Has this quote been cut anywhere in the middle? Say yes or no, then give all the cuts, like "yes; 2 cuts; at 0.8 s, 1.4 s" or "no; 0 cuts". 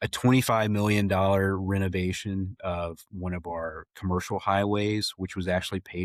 no; 0 cuts